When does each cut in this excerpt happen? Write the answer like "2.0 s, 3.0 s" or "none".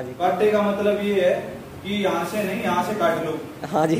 none